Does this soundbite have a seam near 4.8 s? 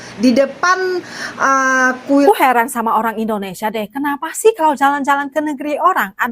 no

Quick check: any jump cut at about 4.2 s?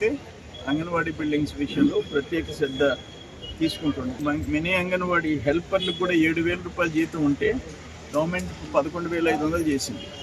yes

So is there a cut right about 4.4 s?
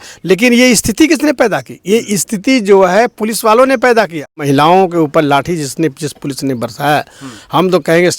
yes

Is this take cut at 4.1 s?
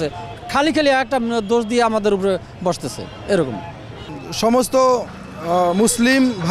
yes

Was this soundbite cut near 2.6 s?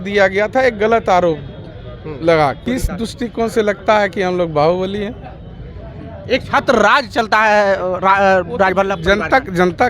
yes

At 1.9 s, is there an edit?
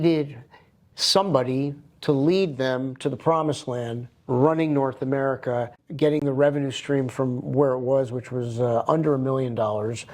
no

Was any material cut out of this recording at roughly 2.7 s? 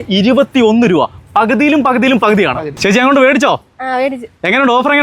yes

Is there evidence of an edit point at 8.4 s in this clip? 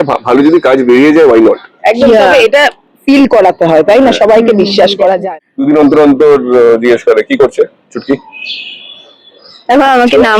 no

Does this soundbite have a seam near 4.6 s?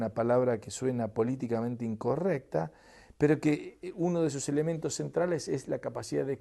yes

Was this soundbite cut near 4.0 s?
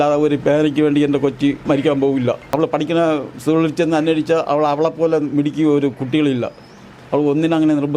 no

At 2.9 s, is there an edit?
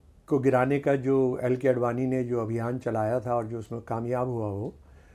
no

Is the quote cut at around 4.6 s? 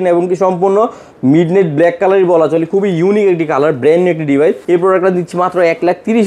yes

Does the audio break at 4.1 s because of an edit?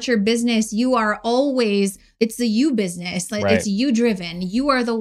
no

